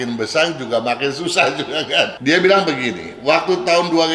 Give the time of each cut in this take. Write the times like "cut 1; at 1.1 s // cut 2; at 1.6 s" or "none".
cut 1; at 2.1 s